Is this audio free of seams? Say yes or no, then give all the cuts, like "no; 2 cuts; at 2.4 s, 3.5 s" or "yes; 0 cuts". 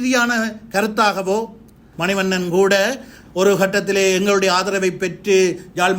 no; 1 cut; at 1.9 s